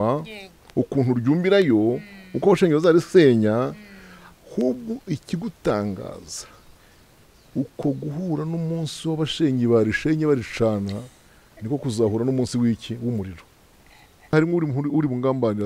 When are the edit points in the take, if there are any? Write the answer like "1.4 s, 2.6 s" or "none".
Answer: 14.3 s